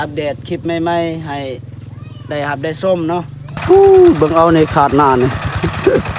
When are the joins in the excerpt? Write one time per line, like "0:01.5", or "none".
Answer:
0:03.5